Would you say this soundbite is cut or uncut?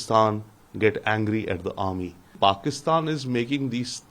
cut